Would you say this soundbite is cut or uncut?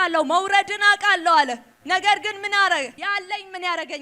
cut